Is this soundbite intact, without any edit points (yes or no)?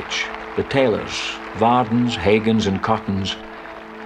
yes